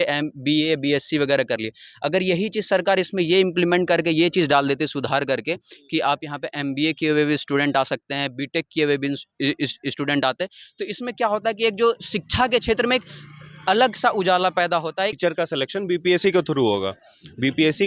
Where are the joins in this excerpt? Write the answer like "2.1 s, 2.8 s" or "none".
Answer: 15.2 s